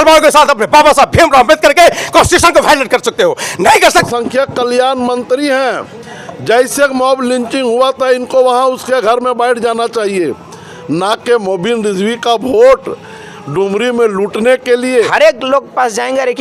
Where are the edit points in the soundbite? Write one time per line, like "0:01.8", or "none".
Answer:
0:04.0
0:15.1

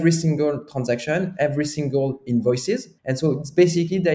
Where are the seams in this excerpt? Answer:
0:03.0

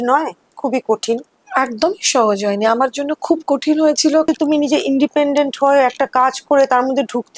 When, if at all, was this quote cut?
0:04.3

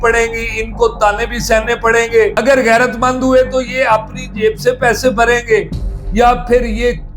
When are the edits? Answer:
0:02.3

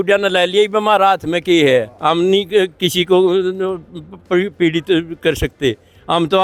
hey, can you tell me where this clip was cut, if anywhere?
none

